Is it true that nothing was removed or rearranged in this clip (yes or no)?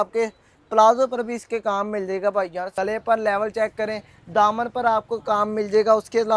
no